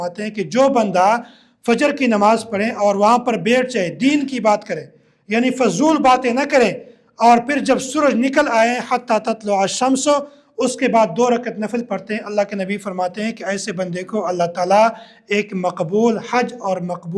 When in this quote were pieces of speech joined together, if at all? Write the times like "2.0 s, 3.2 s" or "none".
none